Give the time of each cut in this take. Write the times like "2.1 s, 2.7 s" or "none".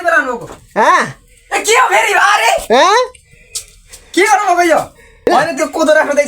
5.3 s